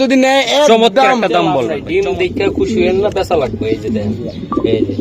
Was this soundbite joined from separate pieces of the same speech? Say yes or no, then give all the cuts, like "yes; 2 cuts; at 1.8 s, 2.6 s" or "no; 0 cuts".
yes; 1 cut; at 1.8 s